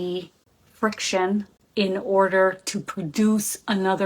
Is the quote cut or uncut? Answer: cut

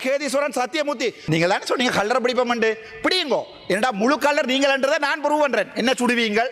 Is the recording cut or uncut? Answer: cut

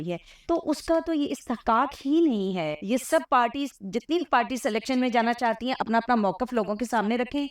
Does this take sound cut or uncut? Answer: cut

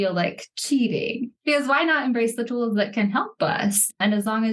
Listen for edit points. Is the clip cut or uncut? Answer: uncut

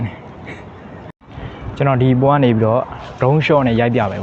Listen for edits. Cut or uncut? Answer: cut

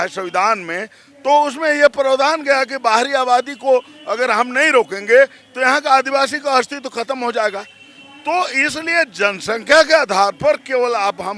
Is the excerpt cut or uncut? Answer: uncut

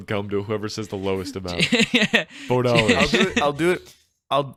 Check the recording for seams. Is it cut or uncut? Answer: uncut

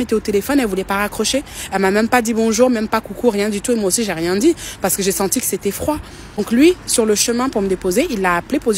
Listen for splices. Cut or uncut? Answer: uncut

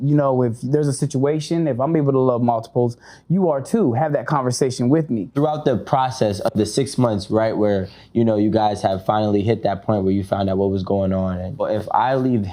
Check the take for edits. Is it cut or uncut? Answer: cut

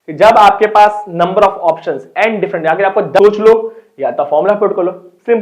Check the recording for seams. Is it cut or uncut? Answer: cut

